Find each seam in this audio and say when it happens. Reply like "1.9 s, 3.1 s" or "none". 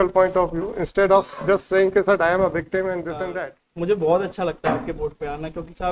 3.3 s